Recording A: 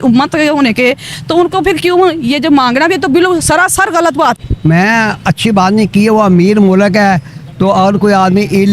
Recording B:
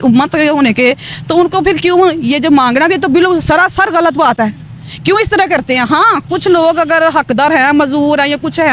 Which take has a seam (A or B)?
A